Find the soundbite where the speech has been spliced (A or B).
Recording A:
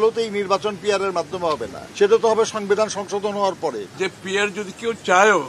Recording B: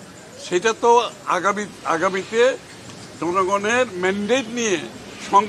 A